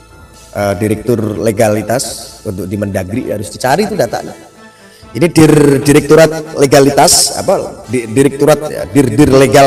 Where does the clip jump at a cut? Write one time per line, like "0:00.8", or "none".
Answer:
none